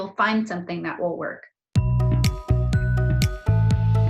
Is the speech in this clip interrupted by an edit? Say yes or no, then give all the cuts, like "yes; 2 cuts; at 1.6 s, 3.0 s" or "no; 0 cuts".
yes; 1 cut; at 1.6 s